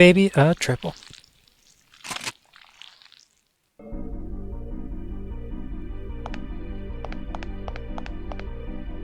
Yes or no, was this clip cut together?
no